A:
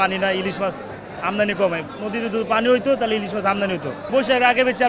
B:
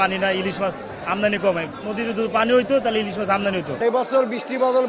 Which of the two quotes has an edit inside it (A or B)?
B